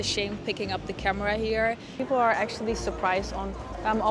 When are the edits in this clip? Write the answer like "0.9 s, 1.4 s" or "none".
1.9 s